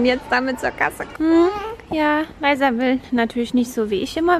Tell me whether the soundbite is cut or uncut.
cut